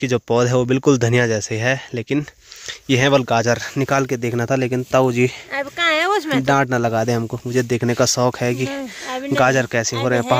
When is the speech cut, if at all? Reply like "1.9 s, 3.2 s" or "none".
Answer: none